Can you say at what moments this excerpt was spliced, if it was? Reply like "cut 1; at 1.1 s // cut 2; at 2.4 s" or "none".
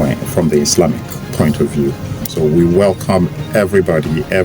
cut 1; at 2.2 s